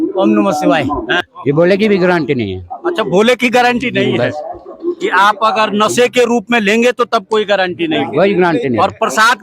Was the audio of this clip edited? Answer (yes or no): yes